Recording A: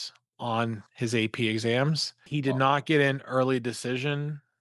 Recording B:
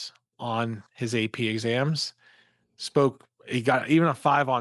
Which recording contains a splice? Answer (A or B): A